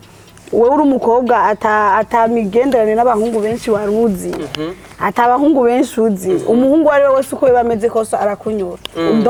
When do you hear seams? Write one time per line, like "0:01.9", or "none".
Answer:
none